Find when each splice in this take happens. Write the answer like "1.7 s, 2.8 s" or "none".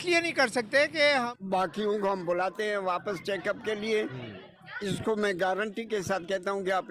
1.3 s